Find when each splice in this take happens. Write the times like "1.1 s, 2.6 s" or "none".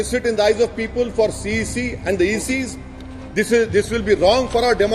none